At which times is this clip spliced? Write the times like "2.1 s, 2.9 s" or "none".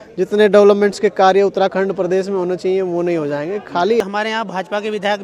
4.0 s